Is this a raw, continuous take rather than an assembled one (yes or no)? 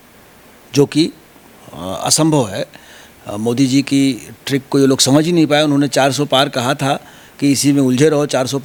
yes